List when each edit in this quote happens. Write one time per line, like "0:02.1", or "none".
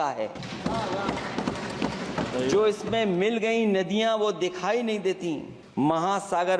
0:05.6